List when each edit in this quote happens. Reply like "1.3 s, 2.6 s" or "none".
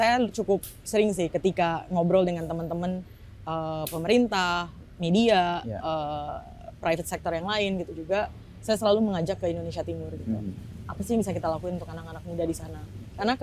none